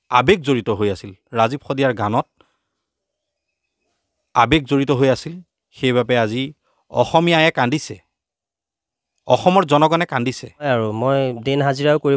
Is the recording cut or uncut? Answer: cut